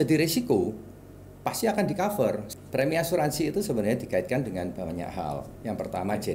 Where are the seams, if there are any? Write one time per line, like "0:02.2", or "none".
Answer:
0:02.5